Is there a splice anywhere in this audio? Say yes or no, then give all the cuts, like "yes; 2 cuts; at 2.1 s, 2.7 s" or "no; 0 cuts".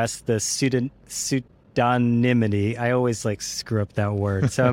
no; 0 cuts